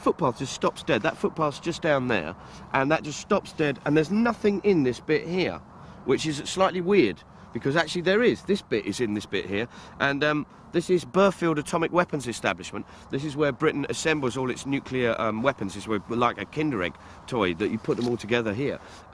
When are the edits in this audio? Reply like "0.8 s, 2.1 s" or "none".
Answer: 7.9 s